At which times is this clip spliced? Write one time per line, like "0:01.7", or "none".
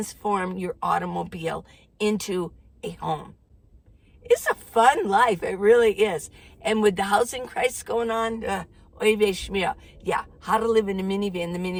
none

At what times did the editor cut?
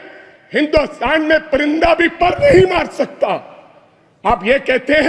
none

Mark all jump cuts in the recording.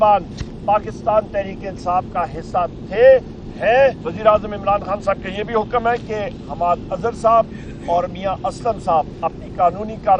0:04.1

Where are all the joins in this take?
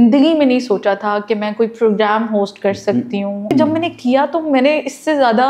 0:03.5

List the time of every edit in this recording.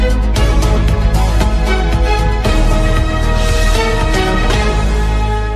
none

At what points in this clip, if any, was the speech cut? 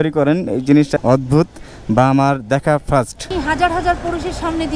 0:00.9
0:03.3

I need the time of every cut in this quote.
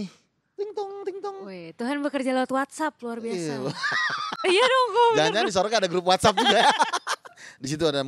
none

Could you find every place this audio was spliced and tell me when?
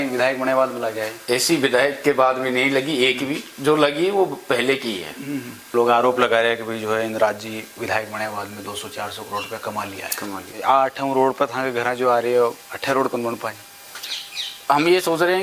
0:05.6
0:10.5

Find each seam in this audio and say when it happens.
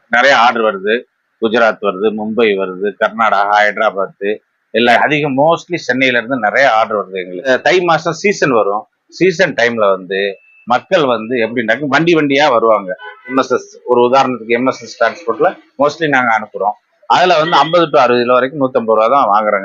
0:05.0
0:07.5
0:13.3

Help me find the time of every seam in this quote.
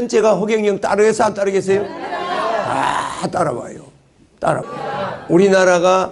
0:04.7

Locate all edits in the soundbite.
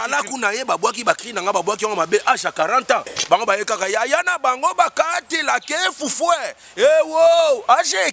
none

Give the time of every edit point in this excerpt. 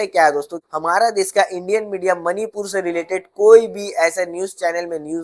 none

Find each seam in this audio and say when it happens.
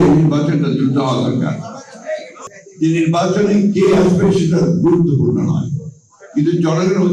0:02.1

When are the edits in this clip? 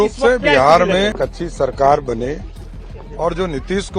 0:01.2

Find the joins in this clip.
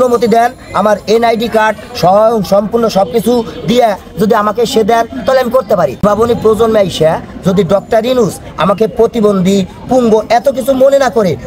0:06.0

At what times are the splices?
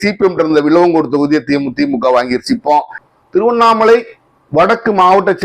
0:03.0

